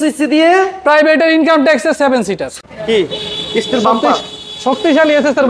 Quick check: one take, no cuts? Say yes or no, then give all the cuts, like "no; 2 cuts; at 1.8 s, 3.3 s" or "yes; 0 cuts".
no; 1 cut; at 2.5 s